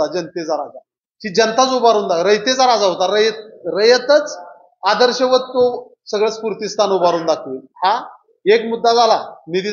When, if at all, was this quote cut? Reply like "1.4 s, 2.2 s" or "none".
none

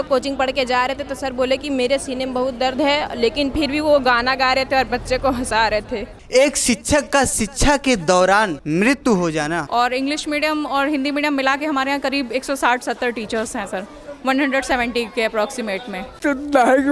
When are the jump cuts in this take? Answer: 6.1 s, 8.6 s, 9.7 s, 16.1 s

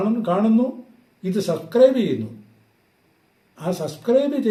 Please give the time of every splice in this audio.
none

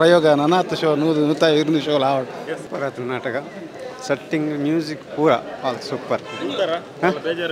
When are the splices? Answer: 2.6 s

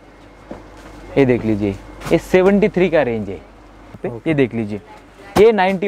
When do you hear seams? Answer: 4.0 s

